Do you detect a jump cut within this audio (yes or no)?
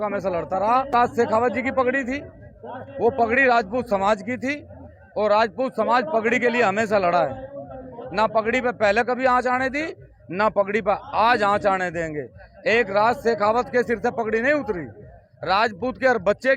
yes